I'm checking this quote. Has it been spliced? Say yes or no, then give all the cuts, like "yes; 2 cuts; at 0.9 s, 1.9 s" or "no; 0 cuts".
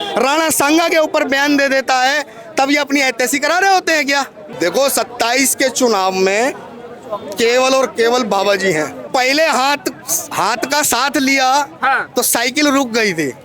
yes; 2 cuts; at 4.4 s, 9.1 s